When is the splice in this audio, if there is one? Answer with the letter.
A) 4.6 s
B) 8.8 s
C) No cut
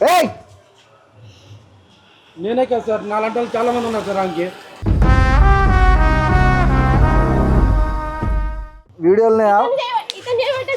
B